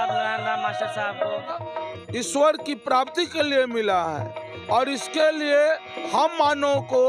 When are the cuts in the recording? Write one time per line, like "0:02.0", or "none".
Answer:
0:01.6